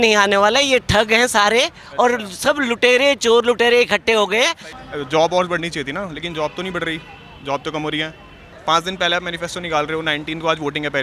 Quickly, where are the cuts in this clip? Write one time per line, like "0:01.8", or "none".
0:04.7
0:08.5